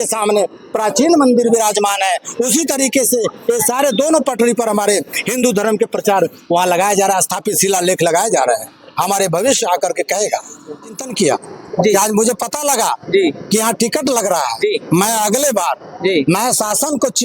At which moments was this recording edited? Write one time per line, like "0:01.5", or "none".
0:11.0